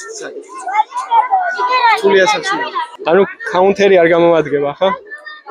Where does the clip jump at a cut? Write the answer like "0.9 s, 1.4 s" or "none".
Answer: none